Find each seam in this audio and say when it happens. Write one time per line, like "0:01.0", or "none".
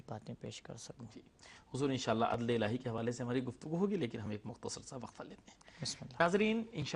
0:02.4